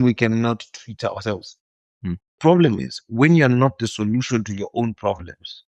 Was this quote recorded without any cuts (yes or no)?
no